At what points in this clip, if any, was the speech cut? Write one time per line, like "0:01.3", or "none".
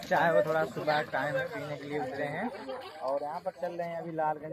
none